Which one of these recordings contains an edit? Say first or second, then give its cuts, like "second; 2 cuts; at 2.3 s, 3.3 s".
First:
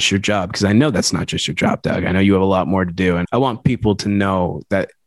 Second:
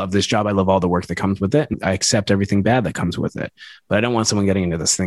first; 1 cut; at 3.2 s